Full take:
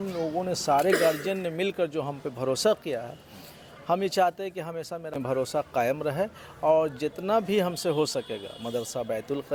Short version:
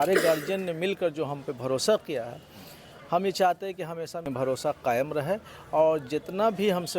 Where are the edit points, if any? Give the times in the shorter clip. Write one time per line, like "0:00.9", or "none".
0:04.5